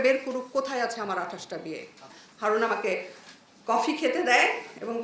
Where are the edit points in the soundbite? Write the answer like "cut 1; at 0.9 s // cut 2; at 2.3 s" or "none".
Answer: cut 1; at 2.0 s